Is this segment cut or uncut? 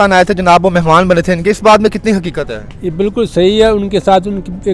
uncut